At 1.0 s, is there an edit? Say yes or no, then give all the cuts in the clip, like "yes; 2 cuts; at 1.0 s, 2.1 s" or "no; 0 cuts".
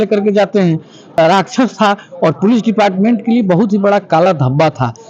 yes; 1 cut; at 1.0 s